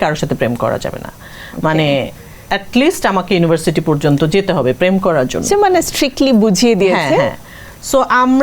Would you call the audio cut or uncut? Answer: uncut